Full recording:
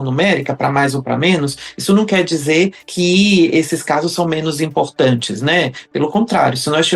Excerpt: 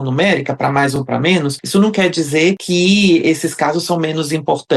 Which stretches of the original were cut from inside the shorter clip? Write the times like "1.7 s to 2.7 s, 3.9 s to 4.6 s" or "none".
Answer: 1.2 s to 1.4 s, 2.8 s to 2.9 s